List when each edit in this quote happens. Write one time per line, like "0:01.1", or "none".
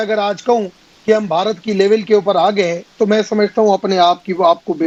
none